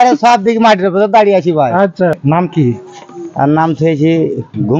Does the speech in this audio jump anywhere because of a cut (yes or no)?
yes